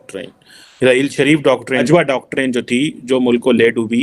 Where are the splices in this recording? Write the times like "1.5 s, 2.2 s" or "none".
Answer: 1.8 s